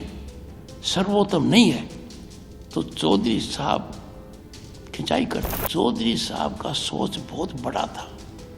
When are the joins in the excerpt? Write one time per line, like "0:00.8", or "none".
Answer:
0:05.6